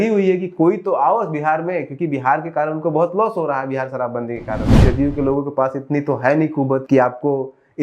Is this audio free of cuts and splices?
no; 2 cuts; at 4.8 s, 6.8 s

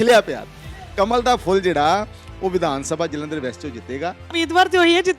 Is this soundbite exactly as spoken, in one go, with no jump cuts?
no; 1 cut; at 4.2 s

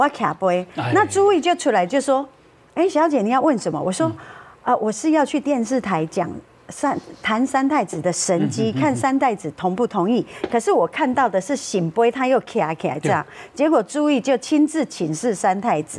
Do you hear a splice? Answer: no; 0 cuts

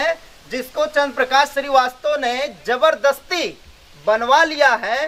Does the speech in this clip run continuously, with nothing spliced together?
yes; 0 cuts

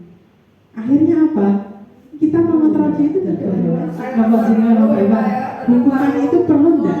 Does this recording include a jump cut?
yes; 1 cut; at 3.4 s

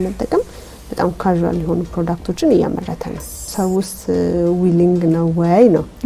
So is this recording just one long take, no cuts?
no; 1 cut; at 3.4 s

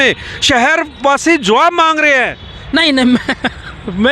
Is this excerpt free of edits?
yes; 0 cuts

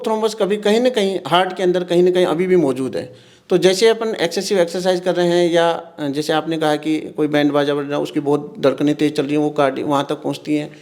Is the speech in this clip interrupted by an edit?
no; 0 cuts

